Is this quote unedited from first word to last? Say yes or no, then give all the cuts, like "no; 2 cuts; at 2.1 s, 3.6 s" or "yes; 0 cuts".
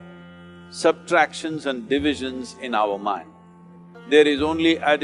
yes; 0 cuts